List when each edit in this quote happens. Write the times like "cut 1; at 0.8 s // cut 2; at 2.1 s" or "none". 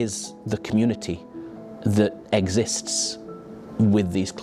none